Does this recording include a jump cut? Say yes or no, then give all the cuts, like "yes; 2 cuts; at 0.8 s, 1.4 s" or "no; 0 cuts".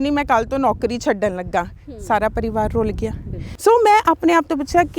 yes; 1 cut; at 3.5 s